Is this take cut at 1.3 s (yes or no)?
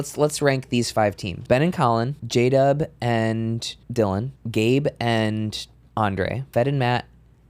yes